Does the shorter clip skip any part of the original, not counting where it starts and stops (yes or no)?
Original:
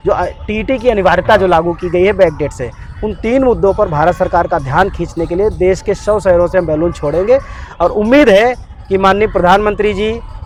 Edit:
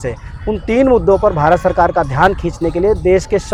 no